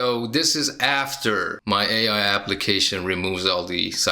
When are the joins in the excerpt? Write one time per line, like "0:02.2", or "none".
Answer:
0:01.5